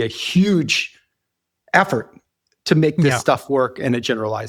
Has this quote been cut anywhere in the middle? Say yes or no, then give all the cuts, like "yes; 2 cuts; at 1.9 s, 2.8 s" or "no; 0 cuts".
no; 0 cuts